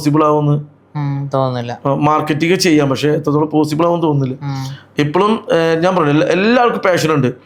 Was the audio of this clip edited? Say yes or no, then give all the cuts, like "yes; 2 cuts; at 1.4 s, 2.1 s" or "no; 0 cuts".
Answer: no; 0 cuts